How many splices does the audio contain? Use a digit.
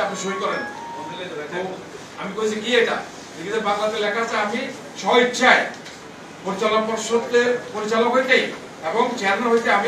0